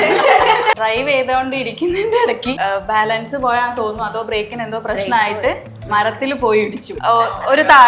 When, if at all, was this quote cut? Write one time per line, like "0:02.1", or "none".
0:00.8
0:02.6
0:06.9